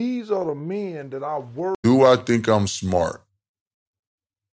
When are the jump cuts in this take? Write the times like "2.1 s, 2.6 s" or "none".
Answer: 1.8 s